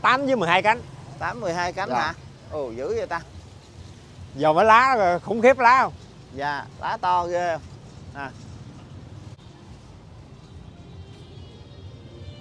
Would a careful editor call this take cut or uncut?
cut